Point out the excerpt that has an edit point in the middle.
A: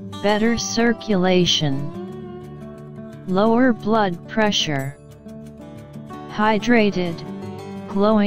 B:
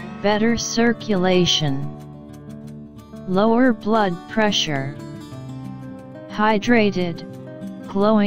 B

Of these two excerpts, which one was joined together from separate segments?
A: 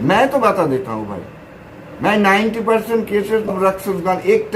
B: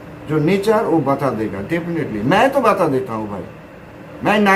A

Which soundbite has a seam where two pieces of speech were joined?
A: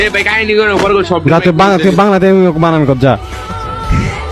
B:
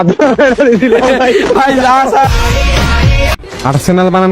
B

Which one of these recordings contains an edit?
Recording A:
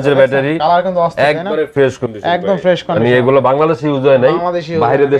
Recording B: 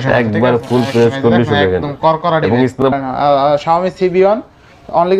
B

